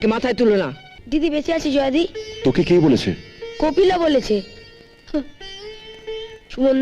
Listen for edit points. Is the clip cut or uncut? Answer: cut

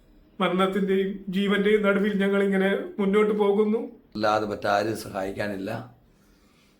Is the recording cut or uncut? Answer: cut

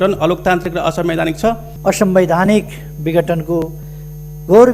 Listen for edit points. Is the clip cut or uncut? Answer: cut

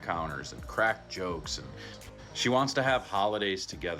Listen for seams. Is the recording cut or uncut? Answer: cut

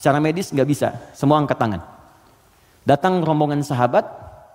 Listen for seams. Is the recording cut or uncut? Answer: uncut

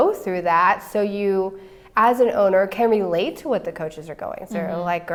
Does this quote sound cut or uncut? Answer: uncut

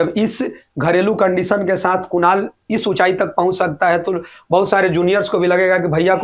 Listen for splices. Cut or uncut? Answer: uncut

